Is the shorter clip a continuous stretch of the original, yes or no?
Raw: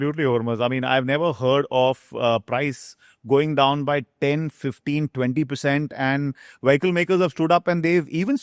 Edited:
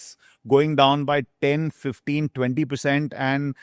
yes